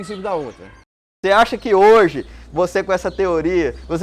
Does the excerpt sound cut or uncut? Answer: cut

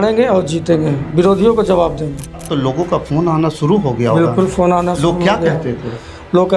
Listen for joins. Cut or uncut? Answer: cut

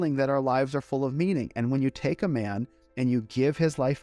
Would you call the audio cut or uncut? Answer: uncut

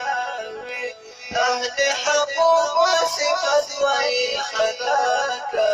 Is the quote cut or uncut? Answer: cut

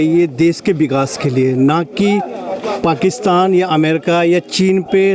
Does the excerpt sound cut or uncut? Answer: uncut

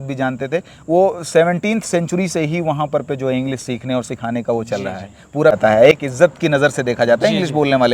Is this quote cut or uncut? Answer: cut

